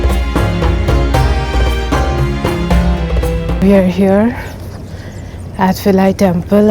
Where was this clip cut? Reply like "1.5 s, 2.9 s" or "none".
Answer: 3.6 s